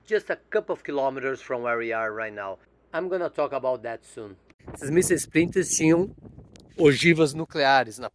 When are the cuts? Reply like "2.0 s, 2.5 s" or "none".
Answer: none